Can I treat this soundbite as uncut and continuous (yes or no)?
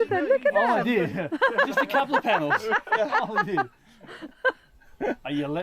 yes